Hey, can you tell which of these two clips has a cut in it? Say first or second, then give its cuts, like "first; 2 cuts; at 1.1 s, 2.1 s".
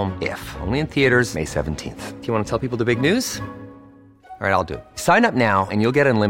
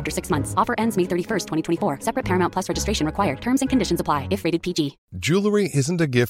second; 1 cut; at 5.1 s